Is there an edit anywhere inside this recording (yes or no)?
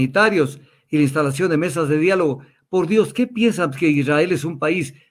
no